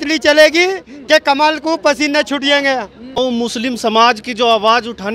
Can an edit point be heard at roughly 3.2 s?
yes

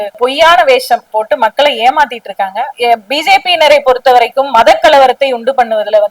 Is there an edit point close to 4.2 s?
no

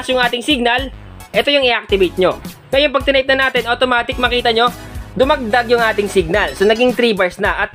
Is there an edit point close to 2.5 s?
yes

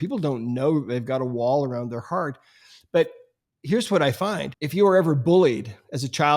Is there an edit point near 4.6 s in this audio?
yes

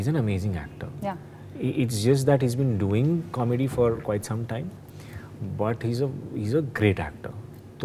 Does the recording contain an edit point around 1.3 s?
no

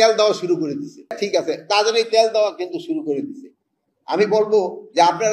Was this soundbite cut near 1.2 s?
yes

